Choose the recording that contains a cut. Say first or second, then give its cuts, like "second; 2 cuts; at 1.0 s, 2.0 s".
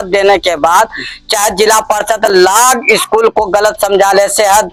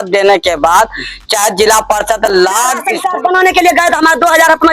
second; 1 cut; at 2.9 s